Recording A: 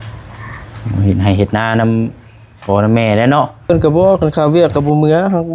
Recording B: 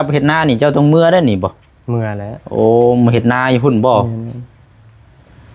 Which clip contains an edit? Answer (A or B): A